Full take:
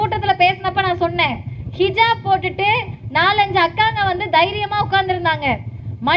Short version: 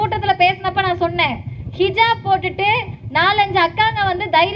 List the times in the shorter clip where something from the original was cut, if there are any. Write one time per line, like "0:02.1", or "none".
none